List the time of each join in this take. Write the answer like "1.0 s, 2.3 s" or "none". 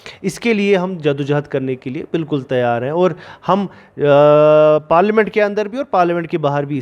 none